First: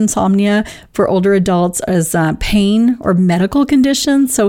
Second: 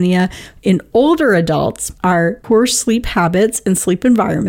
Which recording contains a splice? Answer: second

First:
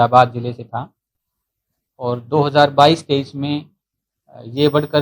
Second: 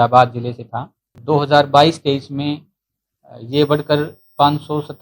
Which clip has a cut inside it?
second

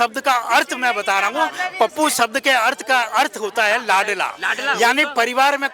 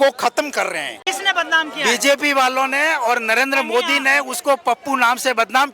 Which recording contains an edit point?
second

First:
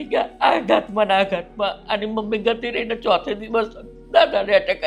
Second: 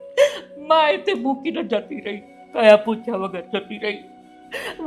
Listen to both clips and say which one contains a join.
second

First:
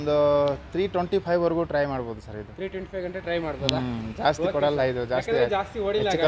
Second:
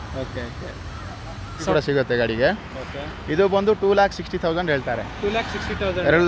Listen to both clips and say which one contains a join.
second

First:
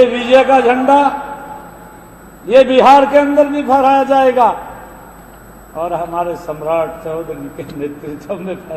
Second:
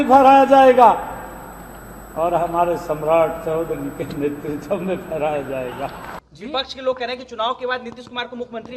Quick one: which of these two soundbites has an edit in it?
second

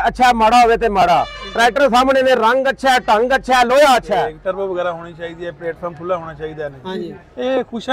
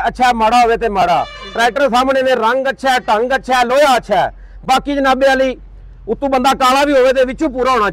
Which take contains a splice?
first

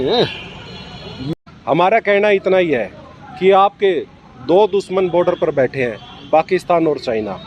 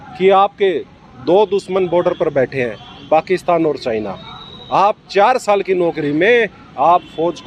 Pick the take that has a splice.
first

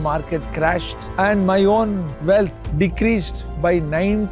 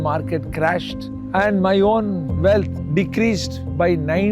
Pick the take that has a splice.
first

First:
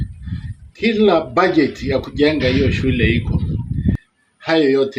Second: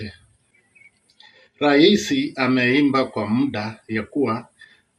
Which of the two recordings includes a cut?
first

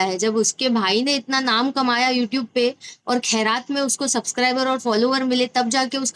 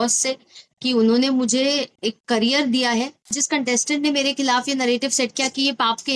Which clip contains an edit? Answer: second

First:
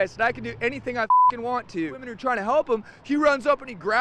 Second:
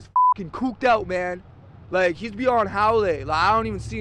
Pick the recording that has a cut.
first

